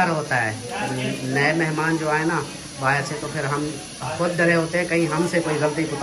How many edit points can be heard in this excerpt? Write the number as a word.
zero